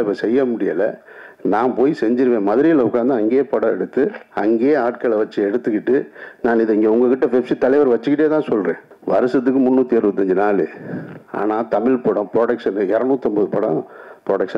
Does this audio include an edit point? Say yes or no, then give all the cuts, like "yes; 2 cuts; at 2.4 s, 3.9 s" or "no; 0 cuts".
yes; 1 cut; at 8.9 s